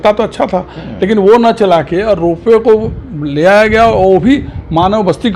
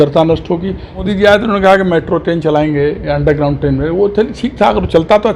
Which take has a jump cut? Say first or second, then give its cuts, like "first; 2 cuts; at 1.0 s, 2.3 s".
second; 1 cut; at 1.0 s